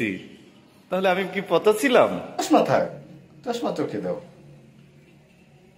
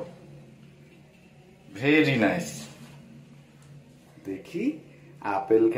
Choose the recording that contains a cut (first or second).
first